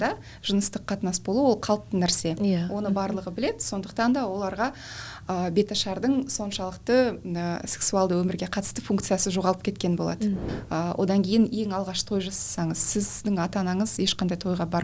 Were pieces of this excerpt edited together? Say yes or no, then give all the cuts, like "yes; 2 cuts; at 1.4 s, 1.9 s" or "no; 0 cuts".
yes; 1 cut; at 10.4 s